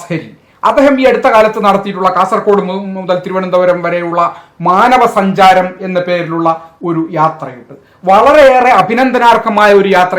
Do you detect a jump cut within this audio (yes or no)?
no